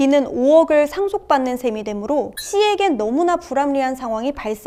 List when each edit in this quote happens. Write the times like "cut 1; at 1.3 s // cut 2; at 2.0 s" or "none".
none

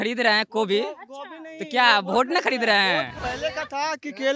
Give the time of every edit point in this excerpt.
cut 1; at 3.2 s

